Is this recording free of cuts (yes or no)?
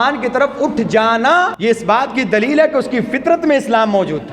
no